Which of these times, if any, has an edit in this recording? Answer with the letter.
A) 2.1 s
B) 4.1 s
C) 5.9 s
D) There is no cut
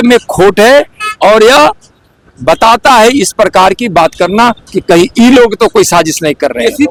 D